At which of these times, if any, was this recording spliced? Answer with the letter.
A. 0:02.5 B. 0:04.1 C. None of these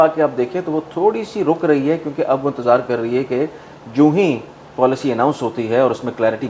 C